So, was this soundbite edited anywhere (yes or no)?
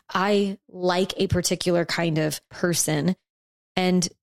yes